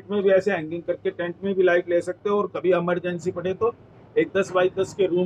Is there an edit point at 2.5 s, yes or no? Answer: no